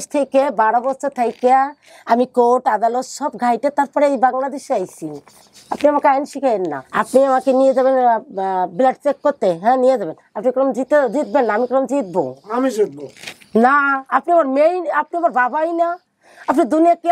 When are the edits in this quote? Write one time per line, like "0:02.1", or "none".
0:06.8
0:12.4

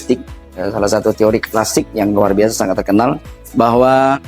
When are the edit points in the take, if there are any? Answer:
none

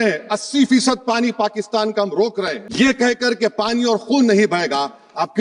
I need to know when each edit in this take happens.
0:02.6

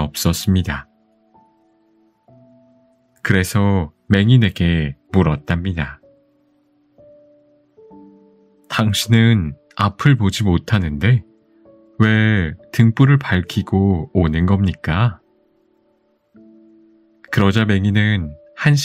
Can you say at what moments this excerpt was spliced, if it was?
none

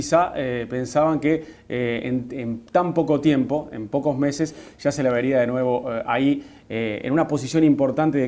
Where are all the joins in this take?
0:02.5

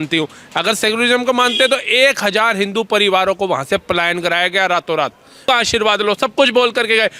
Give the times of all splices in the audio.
0:05.4

